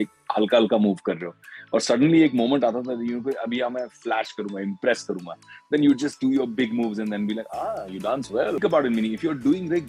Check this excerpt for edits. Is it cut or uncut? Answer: cut